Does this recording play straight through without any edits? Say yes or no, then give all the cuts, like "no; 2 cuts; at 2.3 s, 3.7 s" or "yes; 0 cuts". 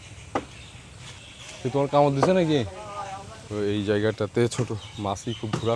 yes; 0 cuts